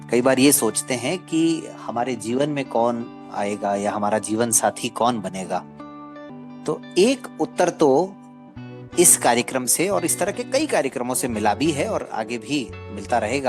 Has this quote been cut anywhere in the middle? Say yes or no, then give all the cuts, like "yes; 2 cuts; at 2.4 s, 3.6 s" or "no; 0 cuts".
yes; 1 cut; at 6.3 s